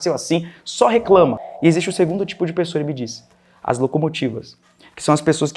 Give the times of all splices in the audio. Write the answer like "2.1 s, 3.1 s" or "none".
1.4 s